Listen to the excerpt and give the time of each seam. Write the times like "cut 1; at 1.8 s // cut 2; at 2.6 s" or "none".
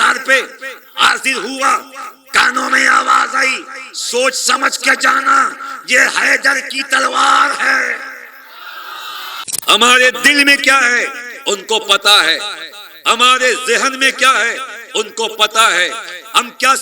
cut 1; at 9.5 s